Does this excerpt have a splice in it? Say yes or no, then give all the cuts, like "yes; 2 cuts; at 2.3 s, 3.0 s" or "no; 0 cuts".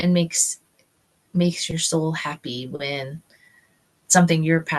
no; 0 cuts